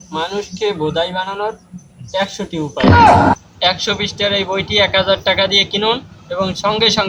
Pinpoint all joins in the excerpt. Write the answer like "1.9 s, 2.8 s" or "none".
none